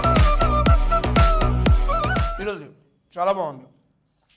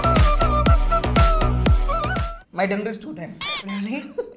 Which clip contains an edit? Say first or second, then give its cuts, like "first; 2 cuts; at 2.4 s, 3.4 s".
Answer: second; 1 cut; at 2.3 s